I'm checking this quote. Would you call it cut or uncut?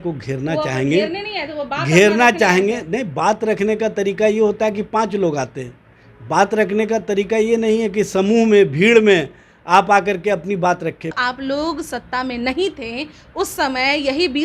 cut